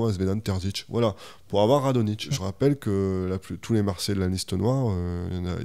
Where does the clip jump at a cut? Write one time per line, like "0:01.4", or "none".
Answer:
0:02.2